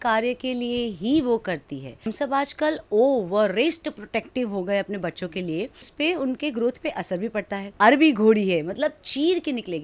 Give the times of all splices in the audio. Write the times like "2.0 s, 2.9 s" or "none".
2.1 s, 5.9 s, 7.6 s

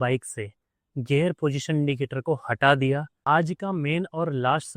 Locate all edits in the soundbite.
3.1 s

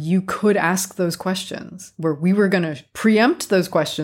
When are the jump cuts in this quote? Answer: none

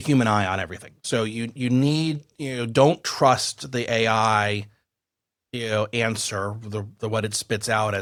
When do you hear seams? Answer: none

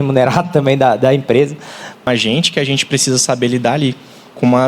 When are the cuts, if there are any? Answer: 2.1 s

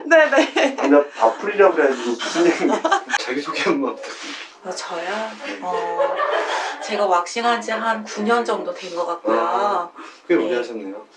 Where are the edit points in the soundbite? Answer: 3.1 s

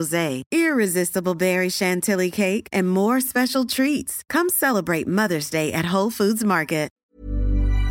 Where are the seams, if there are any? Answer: 7.0 s

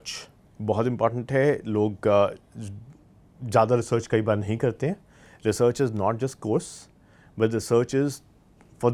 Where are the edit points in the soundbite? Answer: none

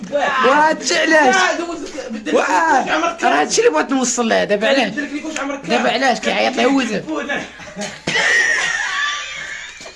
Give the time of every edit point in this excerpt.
none

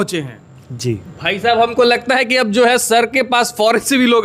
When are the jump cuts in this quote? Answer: none

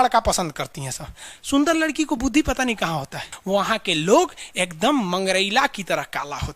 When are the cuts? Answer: 3.3 s

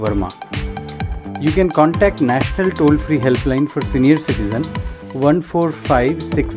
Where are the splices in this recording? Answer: none

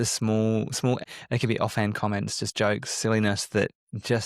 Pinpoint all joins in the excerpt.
1.0 s

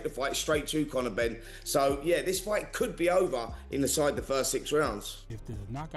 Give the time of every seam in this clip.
5.0 s

